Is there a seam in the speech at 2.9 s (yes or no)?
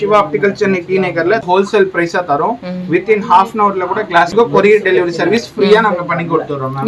no